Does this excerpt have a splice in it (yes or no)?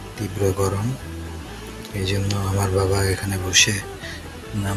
no